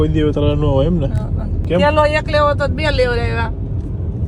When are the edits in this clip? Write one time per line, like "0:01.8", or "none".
none